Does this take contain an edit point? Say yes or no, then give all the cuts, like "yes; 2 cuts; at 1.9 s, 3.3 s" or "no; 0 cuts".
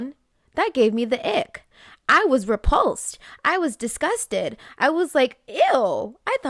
no; 0 cuts